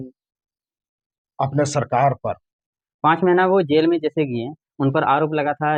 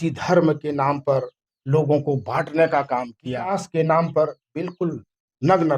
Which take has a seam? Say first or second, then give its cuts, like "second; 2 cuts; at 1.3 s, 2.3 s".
second; 1 cut; at 3.6 s